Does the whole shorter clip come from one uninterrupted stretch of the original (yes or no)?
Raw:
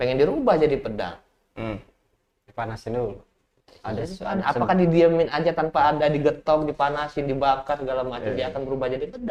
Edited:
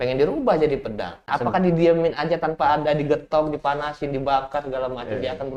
no